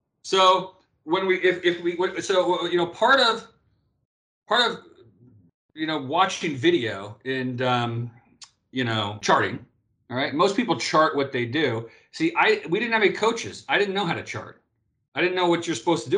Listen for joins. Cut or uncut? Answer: cut